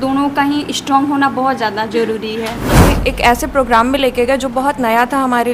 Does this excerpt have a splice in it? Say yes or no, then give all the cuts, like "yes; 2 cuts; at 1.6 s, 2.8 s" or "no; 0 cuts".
yes; 1 cut; at 3.0 s